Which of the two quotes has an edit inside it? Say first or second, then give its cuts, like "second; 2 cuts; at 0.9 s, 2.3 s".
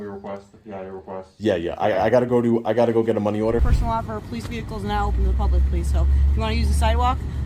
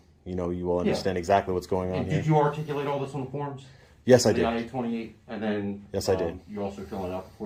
first; 1 cut; at 3.6 s